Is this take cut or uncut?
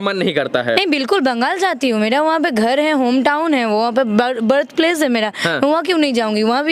uncut